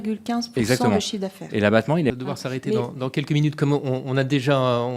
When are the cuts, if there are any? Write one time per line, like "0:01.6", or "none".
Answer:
0:02.1